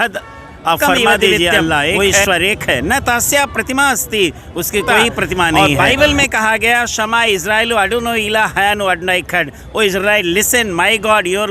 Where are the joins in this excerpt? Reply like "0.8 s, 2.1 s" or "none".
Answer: 1.9 s, 5.6 s